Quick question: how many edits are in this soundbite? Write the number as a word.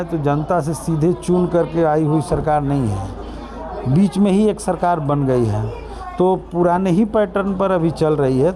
zero